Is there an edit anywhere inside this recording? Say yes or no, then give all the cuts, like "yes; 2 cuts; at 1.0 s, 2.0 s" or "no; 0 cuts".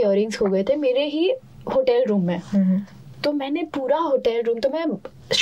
no; 0 cuts